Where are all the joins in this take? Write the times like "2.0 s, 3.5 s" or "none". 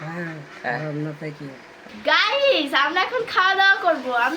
1.9 s